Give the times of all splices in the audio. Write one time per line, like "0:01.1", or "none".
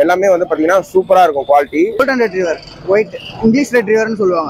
0:02.0